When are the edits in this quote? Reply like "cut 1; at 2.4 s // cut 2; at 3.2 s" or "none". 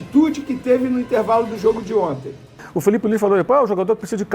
cut 1; at 2.7 s